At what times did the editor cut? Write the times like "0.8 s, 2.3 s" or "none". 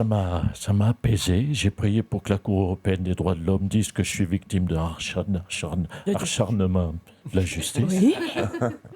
none